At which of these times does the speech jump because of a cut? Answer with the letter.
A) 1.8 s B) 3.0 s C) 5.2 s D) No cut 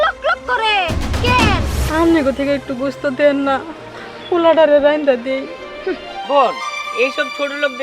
A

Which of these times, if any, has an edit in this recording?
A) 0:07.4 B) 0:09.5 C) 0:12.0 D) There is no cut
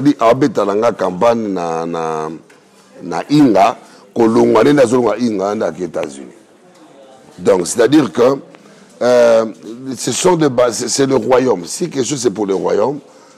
D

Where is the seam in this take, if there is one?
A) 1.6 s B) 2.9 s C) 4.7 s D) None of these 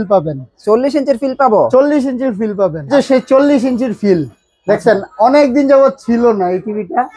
B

